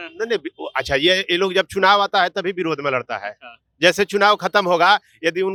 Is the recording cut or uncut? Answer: uncut